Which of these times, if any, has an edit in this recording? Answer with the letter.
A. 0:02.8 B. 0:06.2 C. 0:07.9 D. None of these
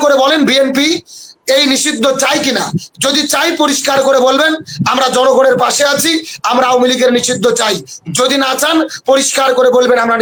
D